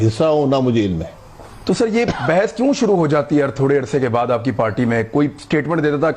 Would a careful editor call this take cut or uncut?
cut